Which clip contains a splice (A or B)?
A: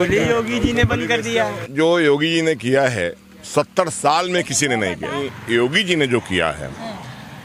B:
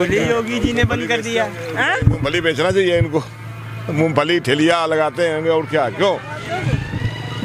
A